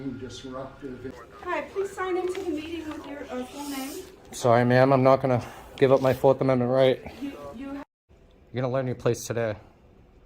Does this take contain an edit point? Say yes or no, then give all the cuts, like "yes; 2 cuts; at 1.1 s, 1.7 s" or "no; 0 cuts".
yes; 2 cuts; at 1.1 s, 7.8 s